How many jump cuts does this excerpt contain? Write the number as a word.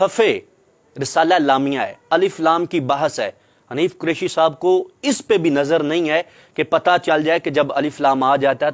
zero